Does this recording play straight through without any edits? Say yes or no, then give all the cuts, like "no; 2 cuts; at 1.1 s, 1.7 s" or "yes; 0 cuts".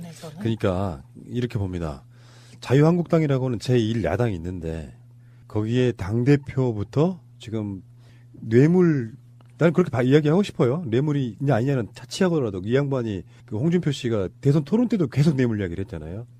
yes; 0 cuts